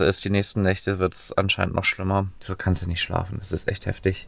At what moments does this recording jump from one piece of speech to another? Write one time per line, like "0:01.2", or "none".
0:02.4